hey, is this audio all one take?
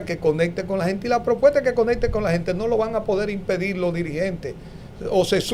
yes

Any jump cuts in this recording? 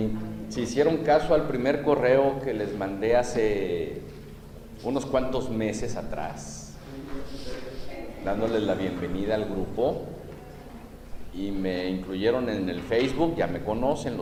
no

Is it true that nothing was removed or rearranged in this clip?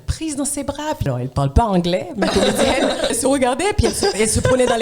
no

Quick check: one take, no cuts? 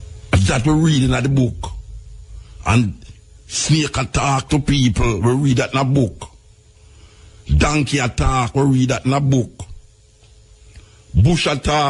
yes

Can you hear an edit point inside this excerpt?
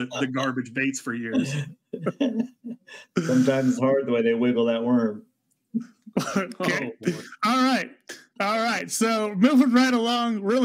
no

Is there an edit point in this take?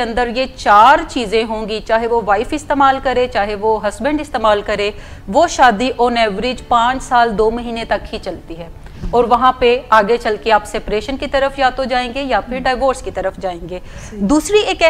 no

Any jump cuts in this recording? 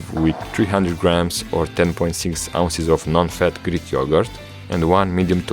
no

